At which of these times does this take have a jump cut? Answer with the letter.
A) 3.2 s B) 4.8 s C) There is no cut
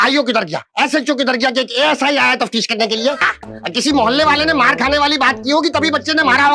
A